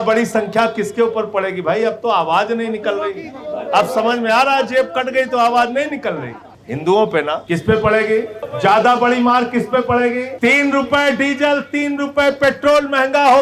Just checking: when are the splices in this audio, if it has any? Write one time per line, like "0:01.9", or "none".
0:07.4
0:08.4
0:10.3